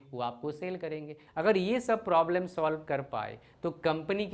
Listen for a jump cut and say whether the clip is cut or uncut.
cut